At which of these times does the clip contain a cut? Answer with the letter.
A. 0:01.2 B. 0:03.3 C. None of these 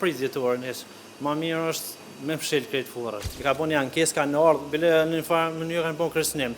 B